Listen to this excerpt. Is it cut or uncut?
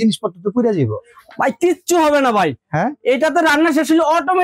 uncut